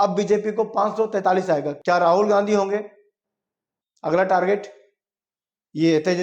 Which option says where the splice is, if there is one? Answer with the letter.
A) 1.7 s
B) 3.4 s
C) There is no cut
A